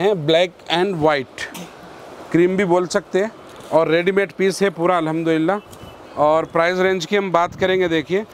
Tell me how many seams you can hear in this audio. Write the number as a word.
zero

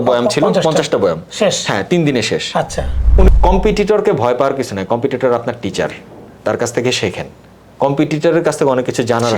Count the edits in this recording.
one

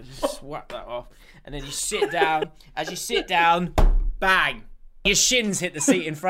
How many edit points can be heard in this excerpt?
one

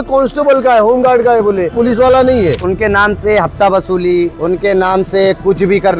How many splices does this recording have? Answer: two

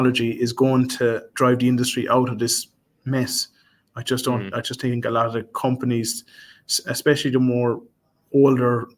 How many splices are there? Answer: one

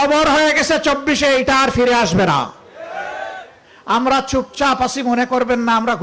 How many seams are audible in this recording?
one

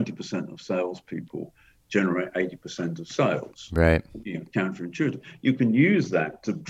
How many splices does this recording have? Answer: zero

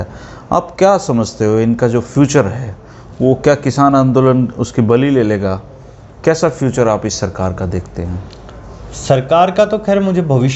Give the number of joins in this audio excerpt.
zero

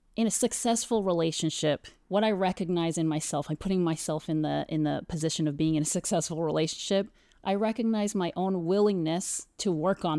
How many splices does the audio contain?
zero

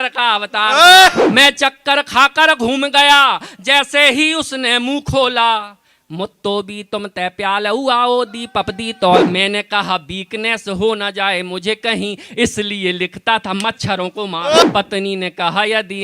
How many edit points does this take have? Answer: three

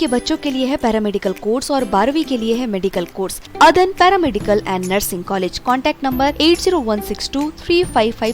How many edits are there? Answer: one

